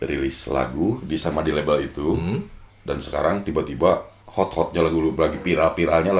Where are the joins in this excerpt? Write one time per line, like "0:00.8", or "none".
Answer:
0:04.2